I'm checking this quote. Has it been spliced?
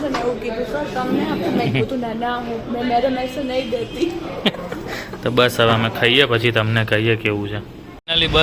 no; 0 cuts

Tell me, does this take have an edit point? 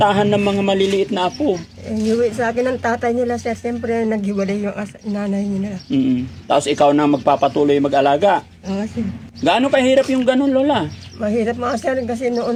no; 0 cuts

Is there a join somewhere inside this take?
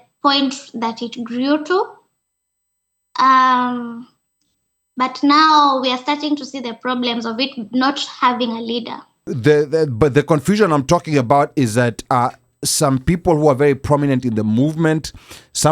yes; 1 cut; at 9.3 s

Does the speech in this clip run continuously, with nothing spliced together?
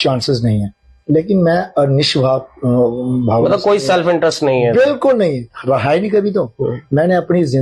yes; 0 cuts

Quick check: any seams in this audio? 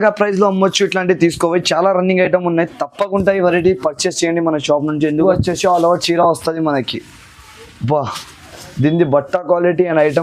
yes; 1 cut; at 5.1 s

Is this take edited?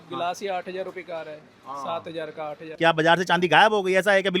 yes; 1 cut; at 2.6 s

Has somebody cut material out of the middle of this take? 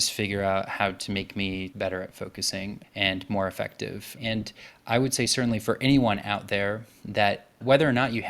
yes; 1 cut; at 1.7 s

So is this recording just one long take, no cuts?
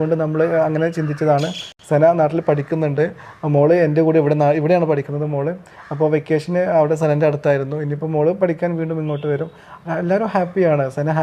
yes; 0 cuts

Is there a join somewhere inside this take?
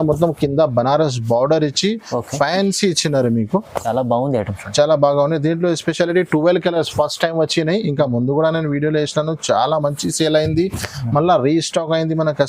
no; 0 cuts

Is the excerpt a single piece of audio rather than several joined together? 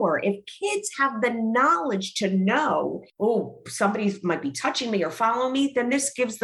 no; 1 cut; at 3.0 s

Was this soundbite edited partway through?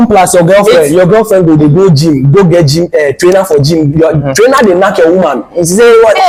no; 0 cuts

